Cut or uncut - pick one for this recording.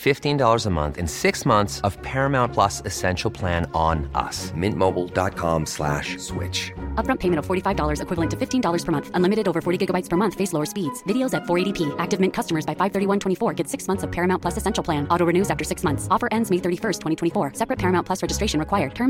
uncut